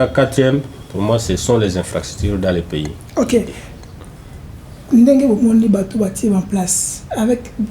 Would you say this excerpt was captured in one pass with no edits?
yes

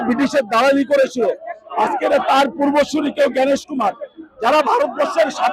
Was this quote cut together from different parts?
no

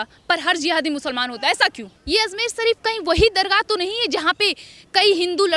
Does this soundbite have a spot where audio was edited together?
yes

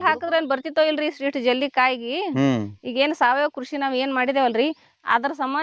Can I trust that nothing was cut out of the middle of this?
yes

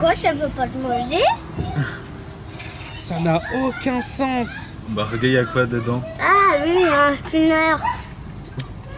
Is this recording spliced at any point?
no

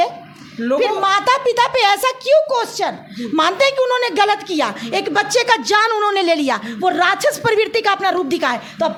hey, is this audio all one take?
yes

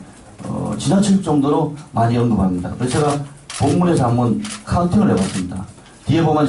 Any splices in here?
yes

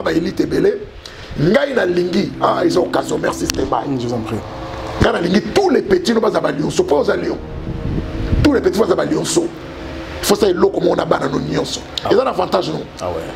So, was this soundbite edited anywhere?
no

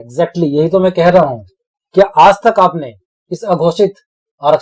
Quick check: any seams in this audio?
no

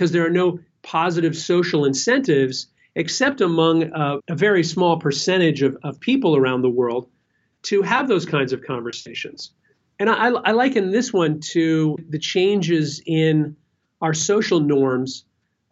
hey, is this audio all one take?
no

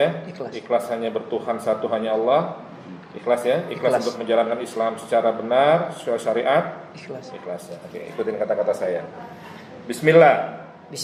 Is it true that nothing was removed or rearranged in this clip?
yes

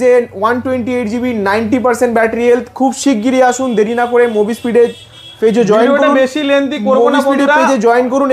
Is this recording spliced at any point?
no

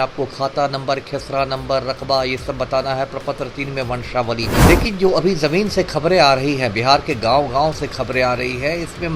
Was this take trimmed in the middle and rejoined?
yes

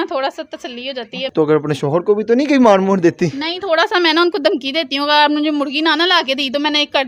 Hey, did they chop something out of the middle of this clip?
yes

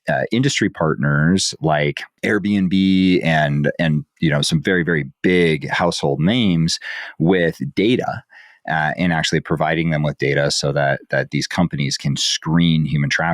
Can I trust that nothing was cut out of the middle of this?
no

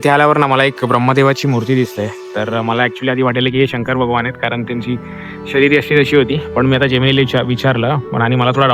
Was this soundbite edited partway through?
no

